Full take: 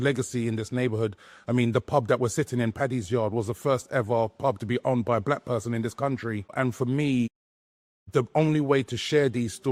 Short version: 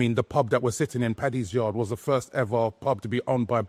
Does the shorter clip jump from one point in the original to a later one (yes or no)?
no